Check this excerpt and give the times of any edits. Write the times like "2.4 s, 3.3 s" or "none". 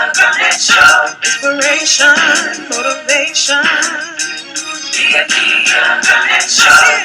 1.1 s